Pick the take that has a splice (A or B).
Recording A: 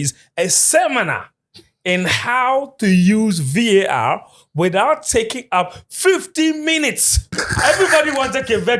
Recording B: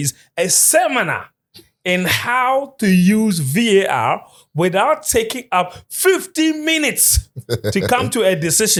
A